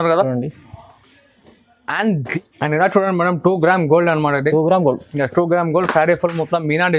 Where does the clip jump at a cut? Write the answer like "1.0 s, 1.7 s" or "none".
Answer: 2.2 s